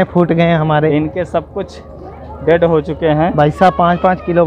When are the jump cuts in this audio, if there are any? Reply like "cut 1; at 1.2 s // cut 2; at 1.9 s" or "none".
none